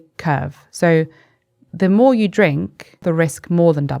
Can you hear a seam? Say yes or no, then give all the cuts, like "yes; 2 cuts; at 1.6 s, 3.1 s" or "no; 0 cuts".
yes; 1 cut; at 3.0 s